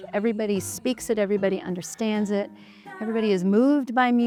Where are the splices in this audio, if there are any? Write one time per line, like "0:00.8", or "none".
none